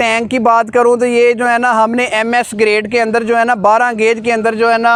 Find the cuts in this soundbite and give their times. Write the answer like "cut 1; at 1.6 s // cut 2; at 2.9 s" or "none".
none